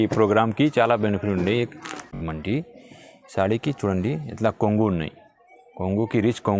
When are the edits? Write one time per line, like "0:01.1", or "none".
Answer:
0:02.1